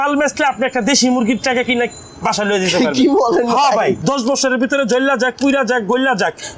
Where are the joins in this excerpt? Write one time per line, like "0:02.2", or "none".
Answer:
0:04.0